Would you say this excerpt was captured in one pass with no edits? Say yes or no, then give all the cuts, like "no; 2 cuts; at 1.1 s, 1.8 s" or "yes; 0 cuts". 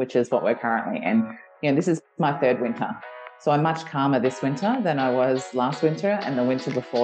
yes; 0 cuts